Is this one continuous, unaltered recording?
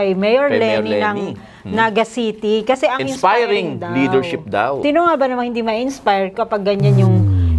yes; 0 cuts

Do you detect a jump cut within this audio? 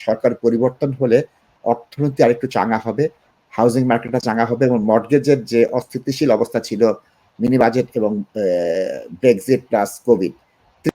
no; 0 cuts

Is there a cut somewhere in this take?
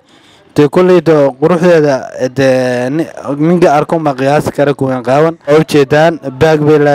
yes; 1 cut; at 5.5 s

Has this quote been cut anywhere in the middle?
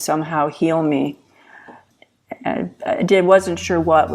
yes; 1 cut; at 1.8 s

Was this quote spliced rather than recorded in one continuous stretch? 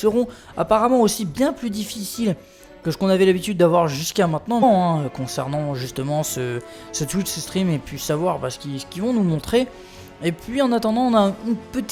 no; 0 cuts

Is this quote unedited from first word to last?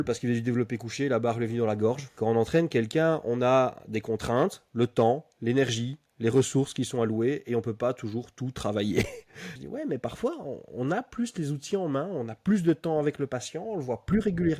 no; 2 cuts; at 2.2 s, 9.6 s

